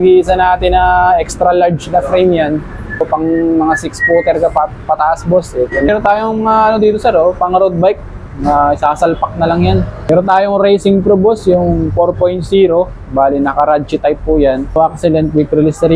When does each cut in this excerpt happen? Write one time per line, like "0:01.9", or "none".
0:03.1
0:05.9
0:10.1
0:14.8